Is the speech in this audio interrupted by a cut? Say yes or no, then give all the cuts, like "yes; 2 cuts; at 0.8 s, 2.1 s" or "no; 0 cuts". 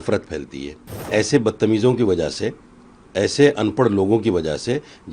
yes; 1 cut; at 1.1 s